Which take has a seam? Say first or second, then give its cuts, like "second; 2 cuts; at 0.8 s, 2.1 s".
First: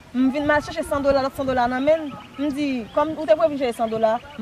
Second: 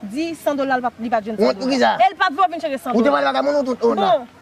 first; 1 cut; at 3.2 s